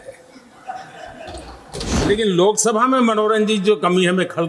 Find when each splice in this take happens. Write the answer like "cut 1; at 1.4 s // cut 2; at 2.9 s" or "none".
cut 1; at 2.0 s